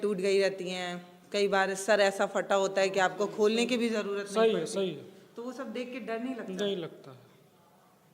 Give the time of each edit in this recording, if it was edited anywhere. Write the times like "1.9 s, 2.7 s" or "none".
none